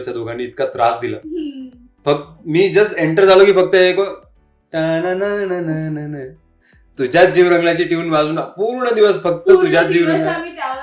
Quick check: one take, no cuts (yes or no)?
yes